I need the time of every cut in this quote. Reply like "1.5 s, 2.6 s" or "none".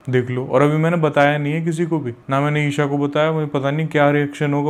none